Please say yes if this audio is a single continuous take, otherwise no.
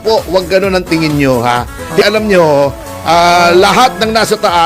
no